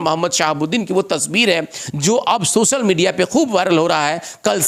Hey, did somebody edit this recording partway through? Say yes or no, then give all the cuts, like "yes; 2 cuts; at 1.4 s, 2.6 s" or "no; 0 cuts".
no; 0 cuts